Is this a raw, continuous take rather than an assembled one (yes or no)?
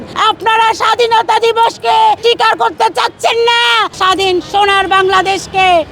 no